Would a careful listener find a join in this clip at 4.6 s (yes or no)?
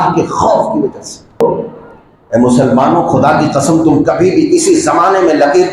no